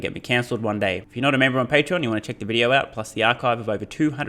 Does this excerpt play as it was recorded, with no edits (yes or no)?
no